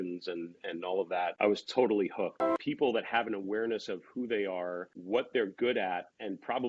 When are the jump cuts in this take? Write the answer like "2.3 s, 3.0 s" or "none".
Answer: 1.3 s, 2.6 s, 4.9 s